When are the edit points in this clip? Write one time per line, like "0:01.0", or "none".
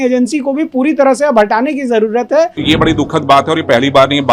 0:02.6